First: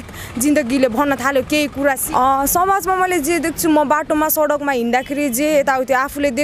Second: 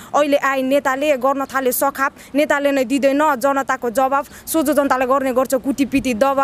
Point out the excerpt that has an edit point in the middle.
first; 1 cut; at 2.0 s

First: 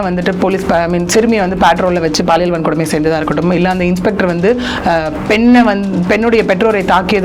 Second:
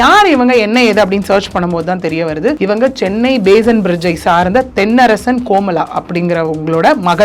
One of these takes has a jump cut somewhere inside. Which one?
second; 1 cut; at 2.6 s

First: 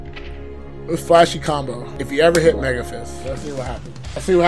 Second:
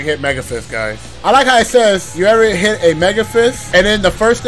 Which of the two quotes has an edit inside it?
second; 2 cuts; at 1.1 s, 2.1 s

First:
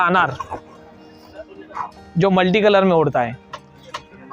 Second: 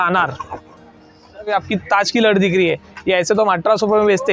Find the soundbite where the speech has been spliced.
second; 1 cut; at 1.5 s

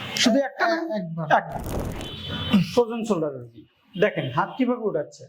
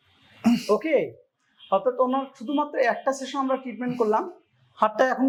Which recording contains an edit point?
first; 1 cut; at 1.6 s

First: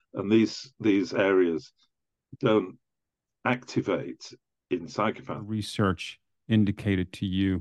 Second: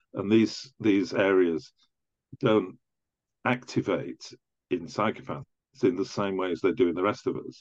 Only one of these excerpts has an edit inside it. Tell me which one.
first; 1 cut; at 5.6 s

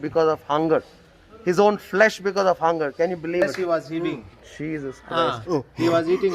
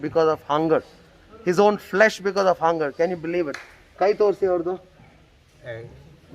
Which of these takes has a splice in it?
first; 1 cut; at 3.4 s

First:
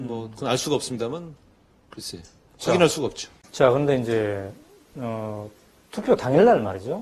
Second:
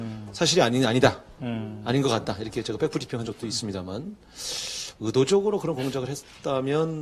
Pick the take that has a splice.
second; 1 cut; at 5.9 s

